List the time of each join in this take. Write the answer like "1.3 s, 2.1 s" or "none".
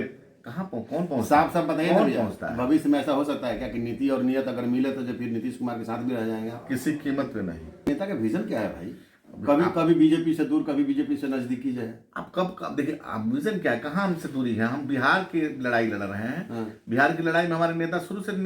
7.9 s